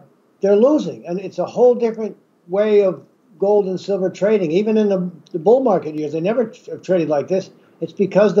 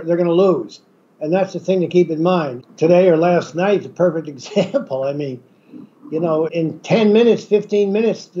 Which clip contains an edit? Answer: second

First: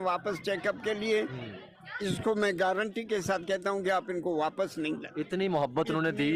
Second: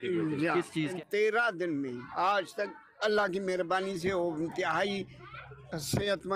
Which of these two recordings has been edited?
second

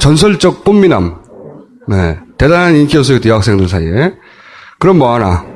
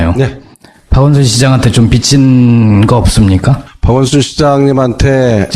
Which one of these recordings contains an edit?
second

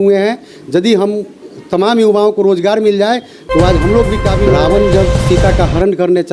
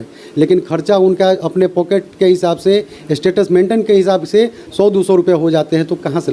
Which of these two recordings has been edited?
first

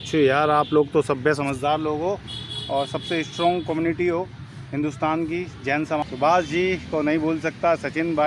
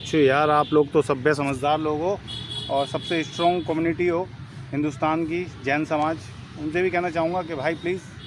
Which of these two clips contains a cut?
first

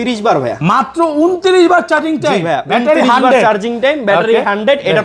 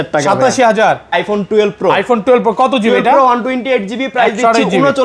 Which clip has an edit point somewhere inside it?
second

